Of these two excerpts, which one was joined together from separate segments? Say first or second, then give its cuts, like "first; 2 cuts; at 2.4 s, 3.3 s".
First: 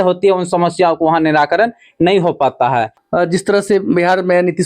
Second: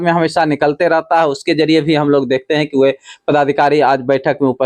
first; 1 cut; at 3.0 s